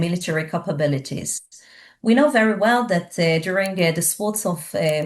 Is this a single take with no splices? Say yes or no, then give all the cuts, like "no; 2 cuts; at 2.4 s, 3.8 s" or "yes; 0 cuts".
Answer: yes; 0 cuts